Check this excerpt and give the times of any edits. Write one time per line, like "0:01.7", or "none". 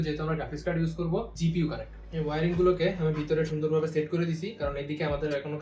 0:01.6

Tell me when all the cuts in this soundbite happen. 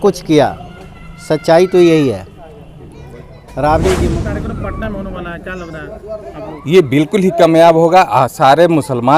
0:04.2

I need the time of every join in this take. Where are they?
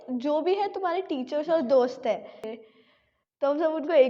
0:02.4

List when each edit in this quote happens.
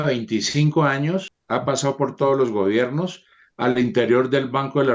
0:01.3

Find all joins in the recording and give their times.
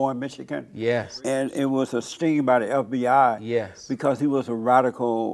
0:01.1
0:02.1

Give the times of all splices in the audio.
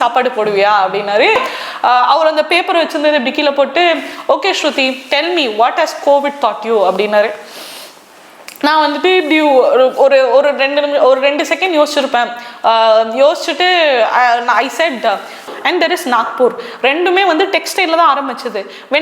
0:01.4
0:15.5

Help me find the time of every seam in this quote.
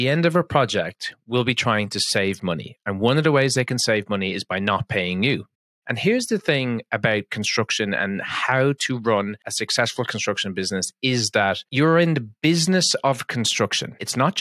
0:05.6

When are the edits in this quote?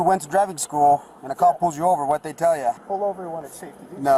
0:02.8

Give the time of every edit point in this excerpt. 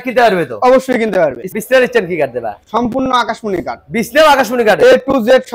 0:01.5

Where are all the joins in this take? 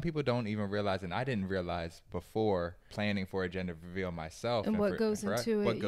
0:02.9

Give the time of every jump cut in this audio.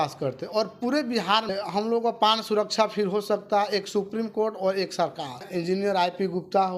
0:01.5
0:05.5

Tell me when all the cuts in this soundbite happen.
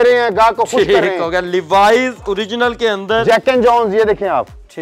none

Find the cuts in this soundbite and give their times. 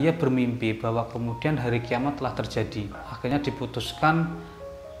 0:03.3

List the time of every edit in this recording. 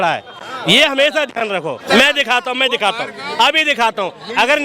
0:01.8

